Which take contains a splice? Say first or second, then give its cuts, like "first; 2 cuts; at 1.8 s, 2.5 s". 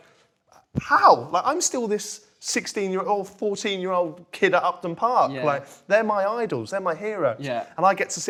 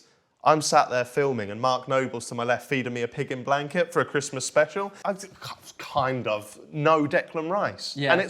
second; 1 cut; at 4.9 s